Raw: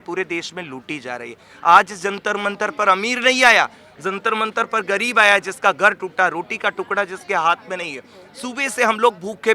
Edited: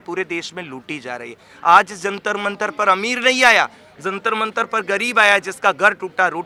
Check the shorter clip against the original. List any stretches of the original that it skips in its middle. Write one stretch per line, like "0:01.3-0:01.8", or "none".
none